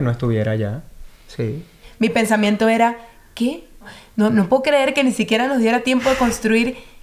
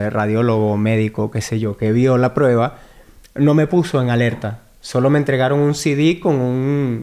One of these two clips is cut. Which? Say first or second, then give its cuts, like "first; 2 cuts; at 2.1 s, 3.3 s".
first; 2 cuts; at 1.8 s, 3.9 s